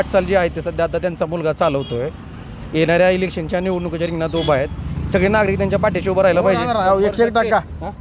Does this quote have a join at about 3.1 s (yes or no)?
no